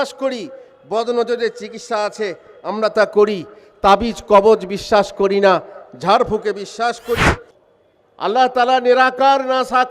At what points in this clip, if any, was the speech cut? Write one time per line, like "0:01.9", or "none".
0:07.5